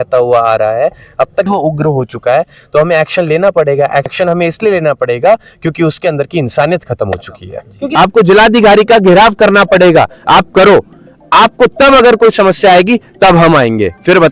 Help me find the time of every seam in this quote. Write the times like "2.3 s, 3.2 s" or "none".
1.5 s, 4.1 s, 7.8 s

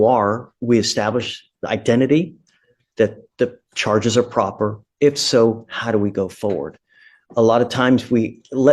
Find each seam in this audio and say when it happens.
none

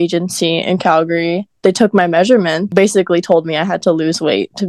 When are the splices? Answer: 1.5 s, 2.7 s

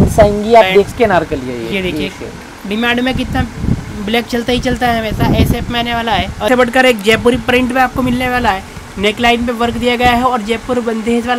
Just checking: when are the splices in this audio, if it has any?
0.9 s, 6.5 s

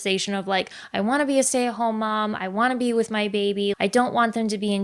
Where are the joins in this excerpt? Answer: 3.8 s

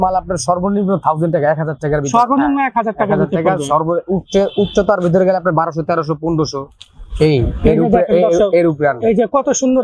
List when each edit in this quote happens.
none

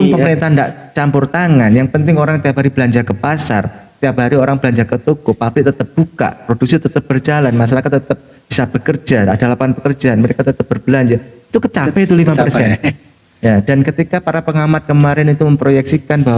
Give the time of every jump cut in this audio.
none

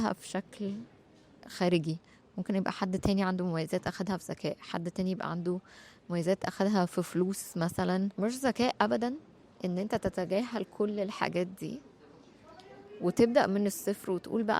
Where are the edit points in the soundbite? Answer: 8.1 s

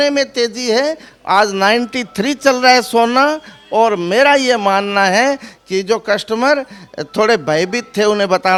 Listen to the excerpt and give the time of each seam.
none

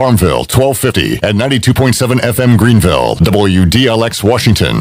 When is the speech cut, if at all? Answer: none

